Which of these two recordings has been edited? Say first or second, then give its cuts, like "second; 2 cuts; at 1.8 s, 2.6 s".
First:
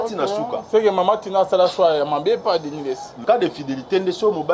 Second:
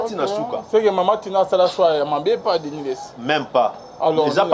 first; 1 cut; at 3.2 s